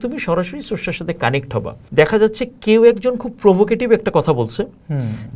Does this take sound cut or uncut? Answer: cut